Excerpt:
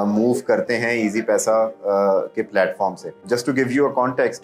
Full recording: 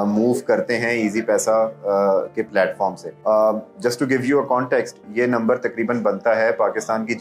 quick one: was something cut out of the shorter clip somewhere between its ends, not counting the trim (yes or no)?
yes